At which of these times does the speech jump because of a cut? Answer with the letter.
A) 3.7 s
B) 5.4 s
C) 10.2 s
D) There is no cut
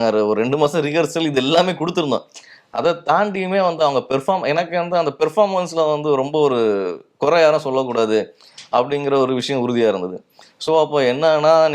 D